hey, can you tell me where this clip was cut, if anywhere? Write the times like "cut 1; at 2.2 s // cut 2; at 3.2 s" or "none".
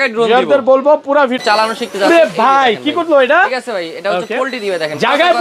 cut 1; at 1.4 s